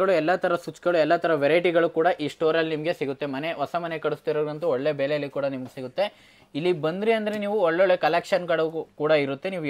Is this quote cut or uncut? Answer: uncut